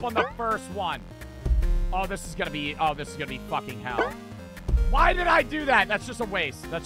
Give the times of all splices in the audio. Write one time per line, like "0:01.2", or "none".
0:01.1